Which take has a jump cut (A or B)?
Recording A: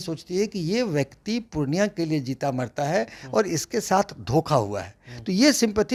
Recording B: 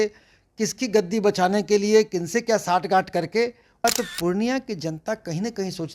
B